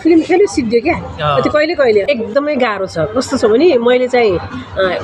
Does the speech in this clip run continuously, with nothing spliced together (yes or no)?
no